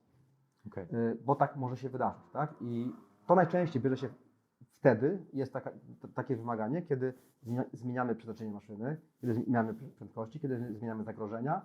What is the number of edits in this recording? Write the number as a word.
zero